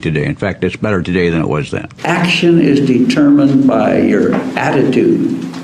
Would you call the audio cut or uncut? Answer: cut